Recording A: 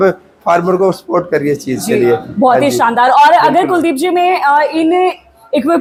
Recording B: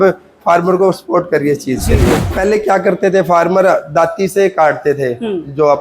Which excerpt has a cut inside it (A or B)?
B